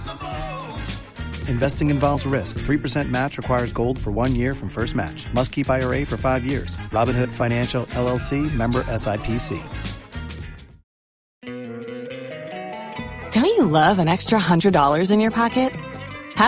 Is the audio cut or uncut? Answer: cut